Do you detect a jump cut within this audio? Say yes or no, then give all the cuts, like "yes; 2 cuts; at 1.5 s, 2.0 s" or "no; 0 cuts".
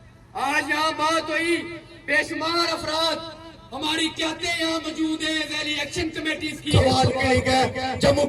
yes; 1 cut; at 6.7 s